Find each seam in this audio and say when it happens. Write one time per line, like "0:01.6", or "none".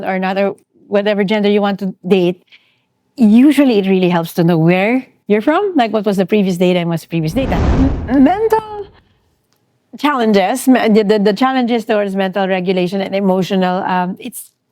0:07.7